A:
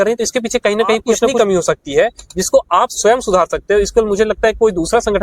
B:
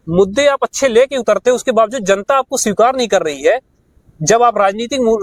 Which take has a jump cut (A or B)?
A